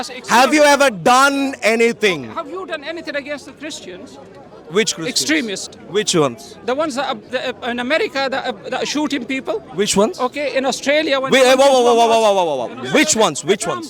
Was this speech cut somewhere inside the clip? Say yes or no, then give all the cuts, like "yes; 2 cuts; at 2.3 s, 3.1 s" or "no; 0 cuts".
no; 0 cuts